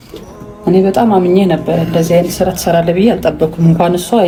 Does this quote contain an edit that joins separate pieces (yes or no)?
no